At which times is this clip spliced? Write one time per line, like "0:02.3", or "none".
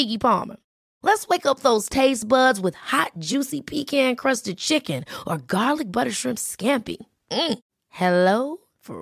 none